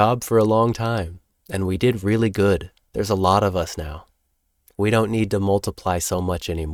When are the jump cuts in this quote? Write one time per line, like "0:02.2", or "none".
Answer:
none

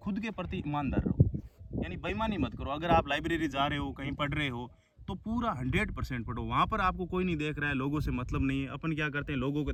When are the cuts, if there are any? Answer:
none

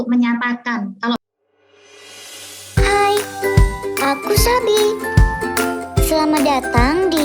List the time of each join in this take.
0:01.2

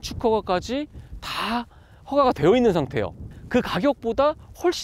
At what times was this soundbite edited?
0:03.3

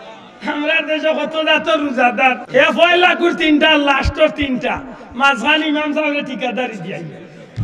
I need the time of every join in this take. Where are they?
0:02.4

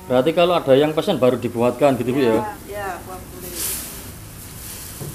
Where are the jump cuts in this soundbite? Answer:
0:02.6
0:04.1

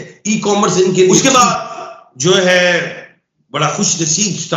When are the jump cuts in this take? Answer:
0:01.2

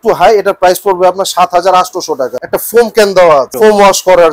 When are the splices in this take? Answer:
0:02.4
0:03.5

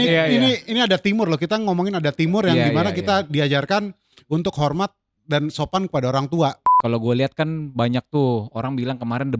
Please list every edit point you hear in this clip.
0:06.7

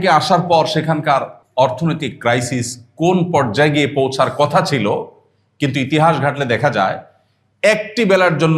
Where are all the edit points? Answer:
0:01.4

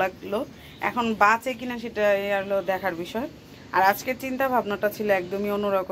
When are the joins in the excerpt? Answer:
none

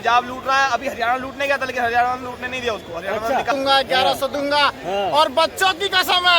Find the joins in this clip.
0:03.5

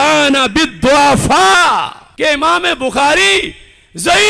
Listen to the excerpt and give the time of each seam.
0:02.0

